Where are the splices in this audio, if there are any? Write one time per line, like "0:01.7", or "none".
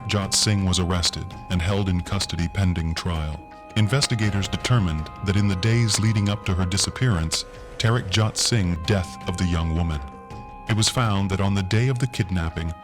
0:08.8